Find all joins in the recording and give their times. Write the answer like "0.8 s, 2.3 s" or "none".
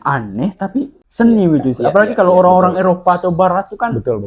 1.0 s